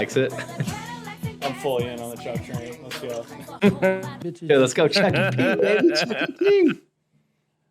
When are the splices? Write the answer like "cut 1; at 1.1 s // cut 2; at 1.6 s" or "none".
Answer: none